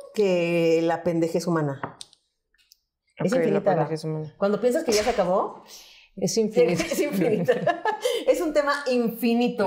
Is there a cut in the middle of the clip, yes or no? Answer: no